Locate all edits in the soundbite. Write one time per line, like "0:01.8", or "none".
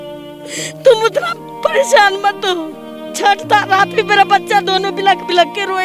0:03.0